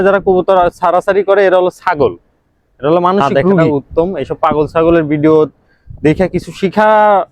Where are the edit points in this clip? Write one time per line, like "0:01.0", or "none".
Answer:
0:03.6

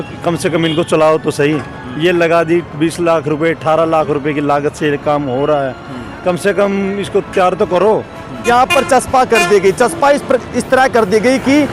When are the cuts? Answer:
0:08.3

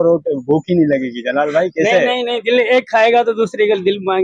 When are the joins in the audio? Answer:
none

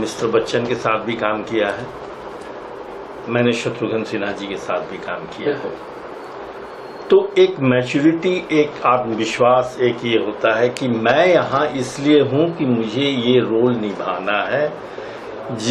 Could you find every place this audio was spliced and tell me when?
none

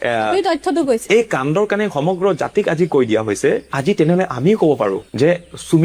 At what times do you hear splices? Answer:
0:01.0

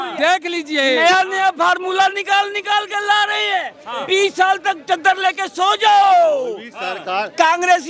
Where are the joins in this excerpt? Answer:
none

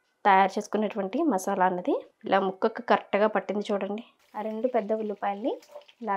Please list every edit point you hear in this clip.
0:04.1

